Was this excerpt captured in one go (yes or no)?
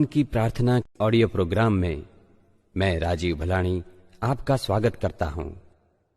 no